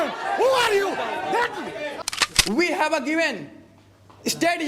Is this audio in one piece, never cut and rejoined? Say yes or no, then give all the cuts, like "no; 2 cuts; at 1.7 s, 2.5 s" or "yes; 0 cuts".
no; 1 cut; at 2.0 s